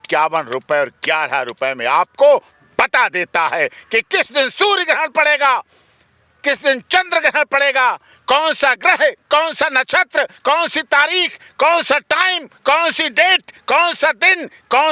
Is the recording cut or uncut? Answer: uncut